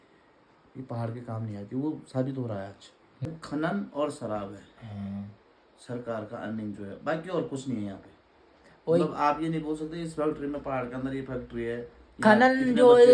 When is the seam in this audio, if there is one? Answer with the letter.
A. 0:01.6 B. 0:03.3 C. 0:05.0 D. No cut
B